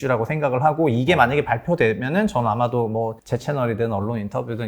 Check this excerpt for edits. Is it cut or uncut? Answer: cut